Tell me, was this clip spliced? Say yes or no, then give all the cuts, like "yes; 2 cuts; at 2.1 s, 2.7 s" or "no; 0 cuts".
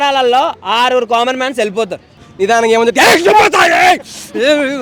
yes; 1 cut; at 2.2 s